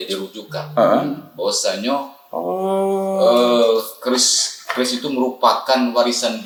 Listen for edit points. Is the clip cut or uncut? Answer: uncut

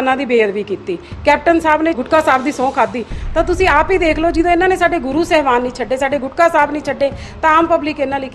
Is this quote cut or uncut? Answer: cut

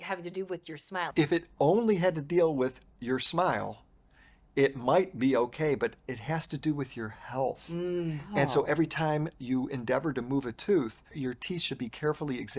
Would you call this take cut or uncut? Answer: cut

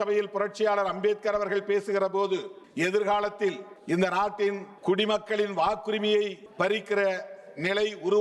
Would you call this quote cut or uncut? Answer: cut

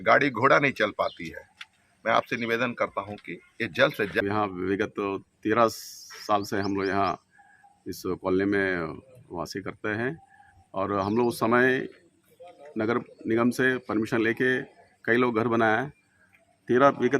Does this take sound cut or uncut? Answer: cut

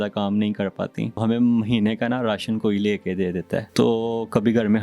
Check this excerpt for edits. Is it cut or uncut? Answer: cut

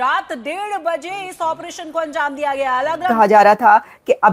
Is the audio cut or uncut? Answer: cut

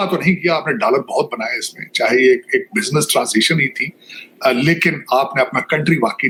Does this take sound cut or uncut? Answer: uncut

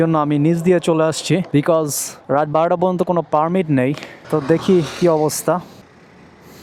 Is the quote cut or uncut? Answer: uncut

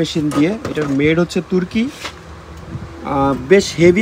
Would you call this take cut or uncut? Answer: uncut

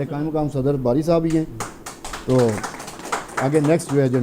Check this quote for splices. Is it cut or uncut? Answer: uncut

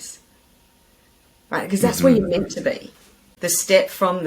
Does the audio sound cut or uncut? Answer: cut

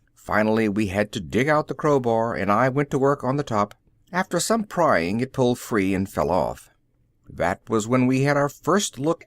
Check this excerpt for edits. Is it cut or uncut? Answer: cut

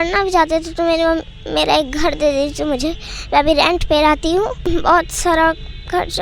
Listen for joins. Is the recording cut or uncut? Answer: cut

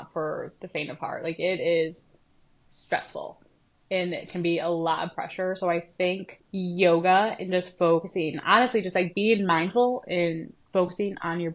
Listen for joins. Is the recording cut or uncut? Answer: cut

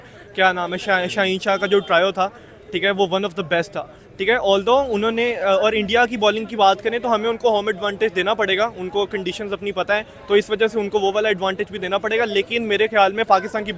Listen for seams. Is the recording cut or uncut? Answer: uncut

